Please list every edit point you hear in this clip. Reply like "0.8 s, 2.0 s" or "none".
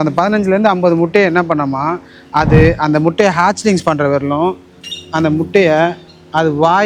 none